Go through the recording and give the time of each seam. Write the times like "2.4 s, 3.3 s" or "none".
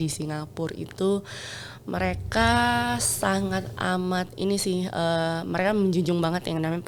none